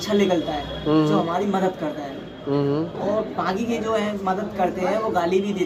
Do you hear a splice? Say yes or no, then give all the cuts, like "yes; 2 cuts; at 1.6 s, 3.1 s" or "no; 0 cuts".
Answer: no; 0 cuts